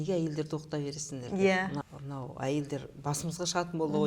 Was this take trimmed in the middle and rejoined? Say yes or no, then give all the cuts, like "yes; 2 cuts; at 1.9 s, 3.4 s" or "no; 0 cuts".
yes; 1 cut; at 1.8 s